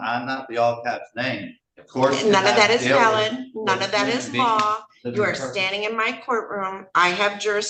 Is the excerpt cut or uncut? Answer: uncut